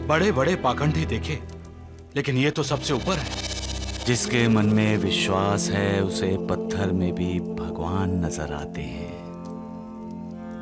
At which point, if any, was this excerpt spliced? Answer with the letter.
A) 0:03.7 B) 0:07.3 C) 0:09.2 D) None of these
D